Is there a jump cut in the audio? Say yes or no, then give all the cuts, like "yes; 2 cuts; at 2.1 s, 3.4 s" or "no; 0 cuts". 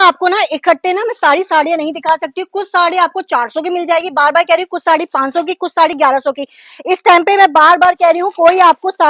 no; 0 cuts